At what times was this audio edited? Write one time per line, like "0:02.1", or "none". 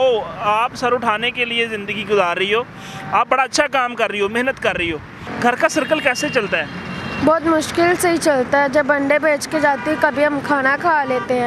0:05.2